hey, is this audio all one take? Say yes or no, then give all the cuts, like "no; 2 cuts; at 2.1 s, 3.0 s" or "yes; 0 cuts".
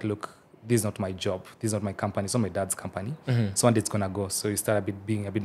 yes; 0 cuts